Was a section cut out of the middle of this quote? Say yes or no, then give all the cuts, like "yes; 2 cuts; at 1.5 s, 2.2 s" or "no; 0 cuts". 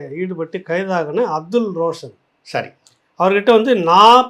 no; 0 cuts